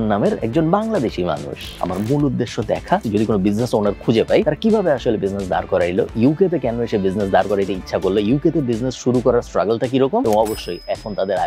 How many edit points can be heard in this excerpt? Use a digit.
2